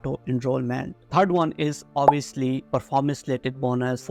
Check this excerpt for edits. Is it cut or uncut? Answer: uncut